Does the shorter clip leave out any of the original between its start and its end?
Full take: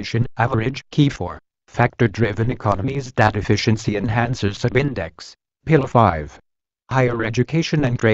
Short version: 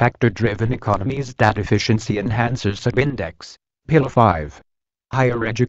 no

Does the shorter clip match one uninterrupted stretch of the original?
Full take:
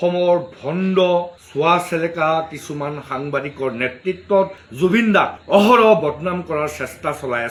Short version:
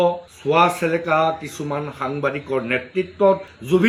yes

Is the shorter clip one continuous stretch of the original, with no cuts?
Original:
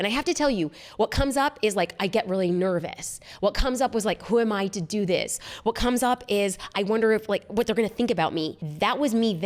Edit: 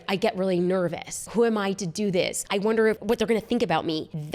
no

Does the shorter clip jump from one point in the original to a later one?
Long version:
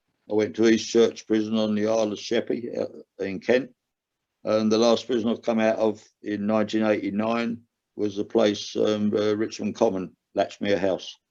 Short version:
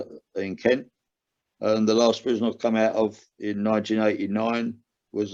no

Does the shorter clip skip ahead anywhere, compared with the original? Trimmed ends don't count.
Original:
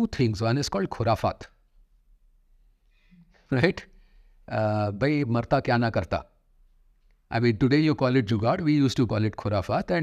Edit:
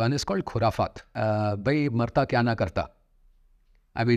yes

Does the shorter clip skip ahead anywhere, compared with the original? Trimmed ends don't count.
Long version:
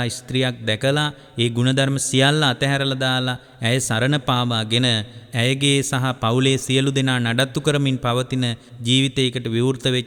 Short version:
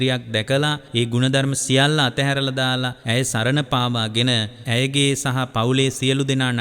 yes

